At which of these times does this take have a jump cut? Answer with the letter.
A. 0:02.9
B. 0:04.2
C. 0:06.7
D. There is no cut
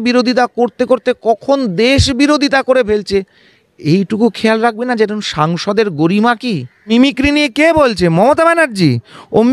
C